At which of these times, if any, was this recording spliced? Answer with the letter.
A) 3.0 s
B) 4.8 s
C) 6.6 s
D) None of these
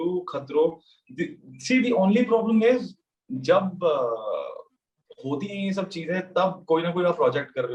D